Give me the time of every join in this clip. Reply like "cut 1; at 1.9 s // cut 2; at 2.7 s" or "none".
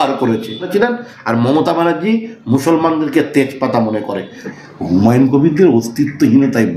cut 1; at 4.5 s